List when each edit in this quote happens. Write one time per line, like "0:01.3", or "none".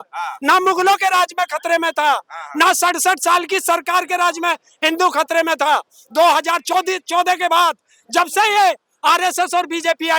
none